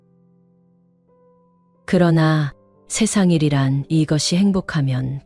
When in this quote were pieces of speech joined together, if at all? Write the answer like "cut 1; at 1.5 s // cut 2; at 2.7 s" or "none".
cut 1; at 1.7 s